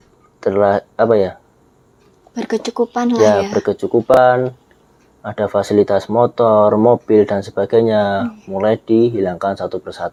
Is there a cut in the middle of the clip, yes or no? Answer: no